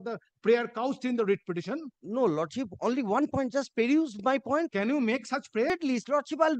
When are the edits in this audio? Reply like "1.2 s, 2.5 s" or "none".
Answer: 5.7 s